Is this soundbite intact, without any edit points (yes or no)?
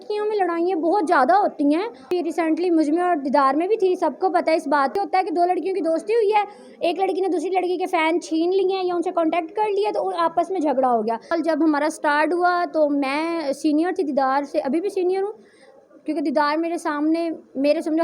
no